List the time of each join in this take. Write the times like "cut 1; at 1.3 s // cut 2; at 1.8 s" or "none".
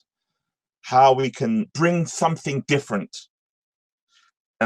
cut 1; at 1.7 s